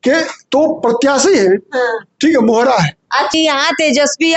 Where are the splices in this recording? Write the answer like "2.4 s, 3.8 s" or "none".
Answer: 3.3 s